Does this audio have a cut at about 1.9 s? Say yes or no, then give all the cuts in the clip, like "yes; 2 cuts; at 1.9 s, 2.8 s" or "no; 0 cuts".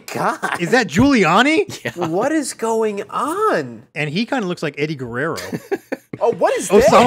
yes; 3 cuts; at 0.7 s, 1.9 s, 3.8 s